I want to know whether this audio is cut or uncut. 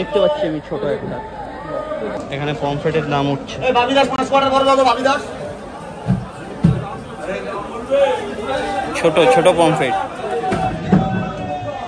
uncut